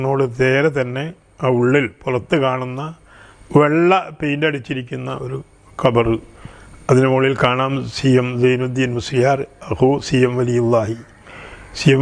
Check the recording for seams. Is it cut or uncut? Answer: uncut